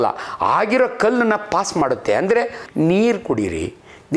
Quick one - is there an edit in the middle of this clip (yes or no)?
yes